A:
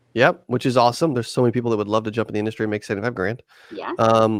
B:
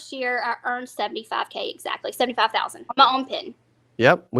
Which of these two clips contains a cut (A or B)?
B